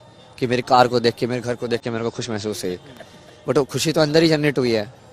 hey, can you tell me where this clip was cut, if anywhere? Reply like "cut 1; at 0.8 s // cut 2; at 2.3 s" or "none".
none